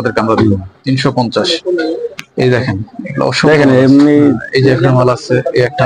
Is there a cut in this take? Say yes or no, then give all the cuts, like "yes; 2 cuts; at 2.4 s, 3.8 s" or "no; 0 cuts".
no; 0 cuts